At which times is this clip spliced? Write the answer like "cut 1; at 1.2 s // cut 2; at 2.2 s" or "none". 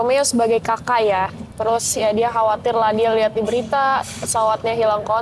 cut 1; at 1.4 s